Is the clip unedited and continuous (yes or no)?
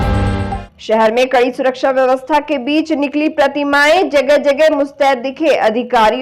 yes